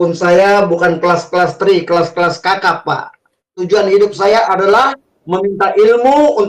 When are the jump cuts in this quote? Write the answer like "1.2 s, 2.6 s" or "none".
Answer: 3.5 s

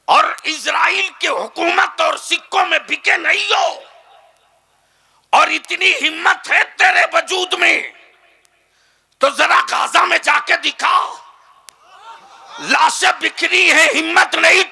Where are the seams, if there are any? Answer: none

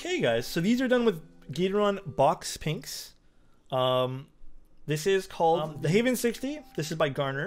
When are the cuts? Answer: 5.8 s

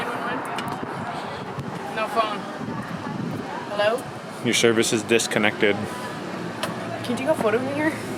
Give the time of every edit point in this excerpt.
none

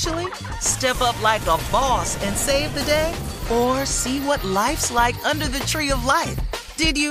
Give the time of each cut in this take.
none

